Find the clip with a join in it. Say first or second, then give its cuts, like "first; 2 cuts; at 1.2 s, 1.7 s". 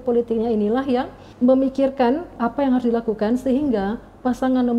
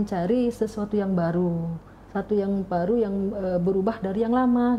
first; 2 cuts; at 1.2 s, 2.3 s